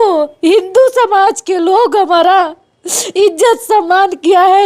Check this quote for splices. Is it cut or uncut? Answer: uncut